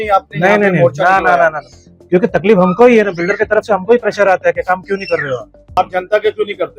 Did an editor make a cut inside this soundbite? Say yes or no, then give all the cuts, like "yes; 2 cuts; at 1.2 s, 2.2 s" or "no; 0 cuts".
yes; 1 cut; at 5.8 s